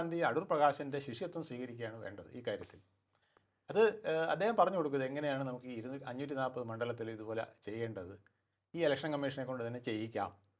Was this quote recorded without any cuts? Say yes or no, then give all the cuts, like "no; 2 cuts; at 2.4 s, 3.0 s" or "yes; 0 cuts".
yes; 0 cuts